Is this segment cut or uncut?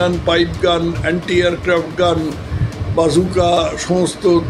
uncut